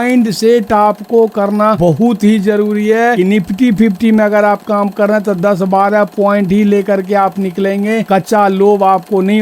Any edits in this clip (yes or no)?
yes